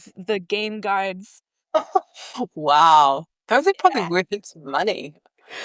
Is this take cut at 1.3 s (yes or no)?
no